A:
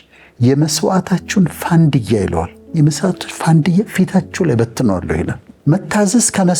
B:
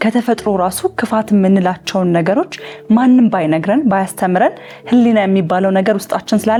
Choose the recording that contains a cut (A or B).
A